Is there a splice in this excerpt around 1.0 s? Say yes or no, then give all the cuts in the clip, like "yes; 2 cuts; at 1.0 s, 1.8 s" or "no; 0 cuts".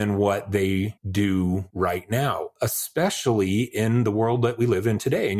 yes; 2 cuts; at 1.0 s, 1.7 s